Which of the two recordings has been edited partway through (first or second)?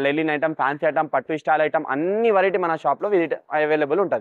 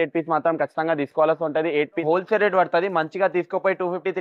second